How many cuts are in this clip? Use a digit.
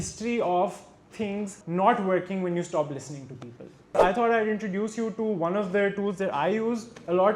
2